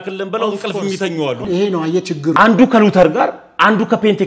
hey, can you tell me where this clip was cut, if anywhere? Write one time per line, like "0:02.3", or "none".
0:01.6